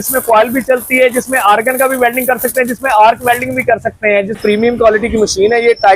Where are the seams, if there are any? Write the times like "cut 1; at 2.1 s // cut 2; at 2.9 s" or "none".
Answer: cut 1; at 4.4 s